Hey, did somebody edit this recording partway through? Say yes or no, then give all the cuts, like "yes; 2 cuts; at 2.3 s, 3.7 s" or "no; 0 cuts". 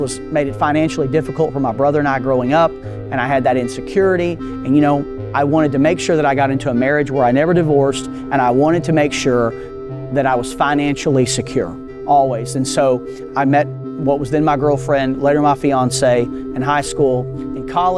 no; 0 cuts